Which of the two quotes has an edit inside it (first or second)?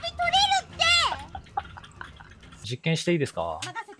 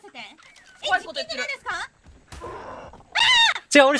first